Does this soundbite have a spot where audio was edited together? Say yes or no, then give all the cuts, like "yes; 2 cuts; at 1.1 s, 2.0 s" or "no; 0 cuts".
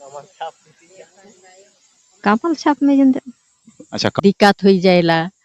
yes; 1 cut; at 4.1 s